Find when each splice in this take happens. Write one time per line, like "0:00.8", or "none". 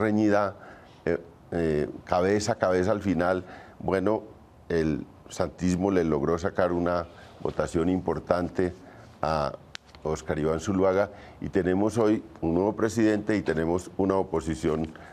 0:12.2